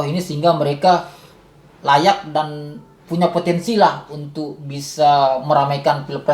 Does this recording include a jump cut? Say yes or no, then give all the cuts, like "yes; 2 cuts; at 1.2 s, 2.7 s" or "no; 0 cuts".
no; 0 cuts